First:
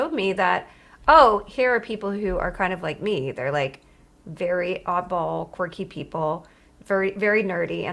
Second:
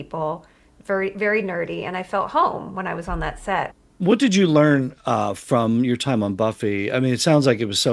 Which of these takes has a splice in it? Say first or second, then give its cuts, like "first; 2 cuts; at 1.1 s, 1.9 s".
second; 1 cut; at 3.7 s